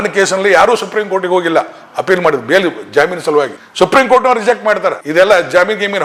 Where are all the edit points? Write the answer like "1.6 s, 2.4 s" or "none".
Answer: none